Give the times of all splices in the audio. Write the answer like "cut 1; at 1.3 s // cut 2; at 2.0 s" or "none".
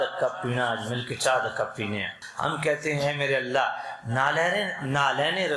cut 1; at 2.2 s